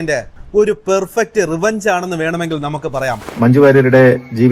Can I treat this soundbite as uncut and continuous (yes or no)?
no